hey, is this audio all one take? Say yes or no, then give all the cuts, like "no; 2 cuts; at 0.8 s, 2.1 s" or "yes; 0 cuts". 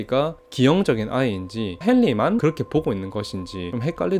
yes; 0 cuts